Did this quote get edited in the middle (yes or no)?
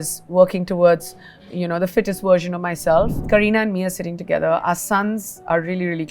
yes